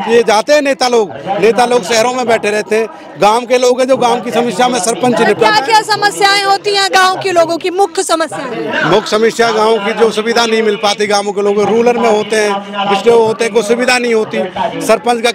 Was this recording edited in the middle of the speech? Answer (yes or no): no